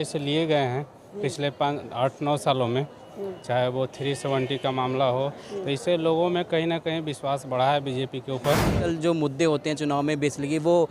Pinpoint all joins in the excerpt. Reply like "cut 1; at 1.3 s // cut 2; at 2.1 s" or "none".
cut 1; at 8.9 s